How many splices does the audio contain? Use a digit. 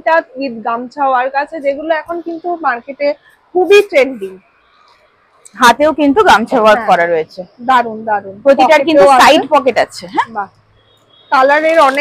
0